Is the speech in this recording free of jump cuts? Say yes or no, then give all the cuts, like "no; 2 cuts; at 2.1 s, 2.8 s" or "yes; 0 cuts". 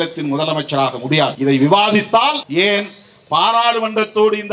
no; 2 cuts; at 1.3 s, 2.4 s